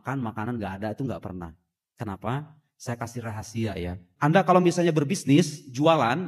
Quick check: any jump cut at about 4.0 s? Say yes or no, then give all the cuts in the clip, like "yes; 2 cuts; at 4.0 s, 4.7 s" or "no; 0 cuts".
yes; 1 cut; at 4.0 s